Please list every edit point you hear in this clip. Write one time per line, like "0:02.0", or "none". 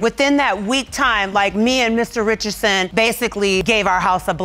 none